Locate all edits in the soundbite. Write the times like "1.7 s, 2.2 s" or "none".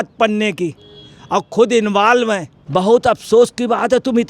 2.5 s